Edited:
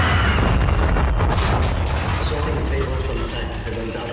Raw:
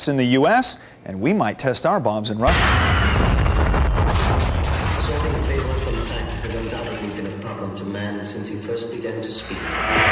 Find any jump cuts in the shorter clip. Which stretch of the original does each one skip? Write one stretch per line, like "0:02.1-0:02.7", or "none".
none